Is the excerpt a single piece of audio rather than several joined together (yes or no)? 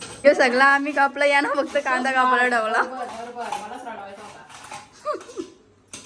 yes